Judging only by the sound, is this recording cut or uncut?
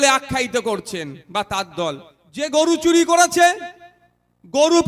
cut